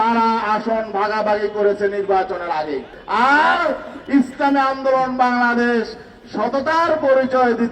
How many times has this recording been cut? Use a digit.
1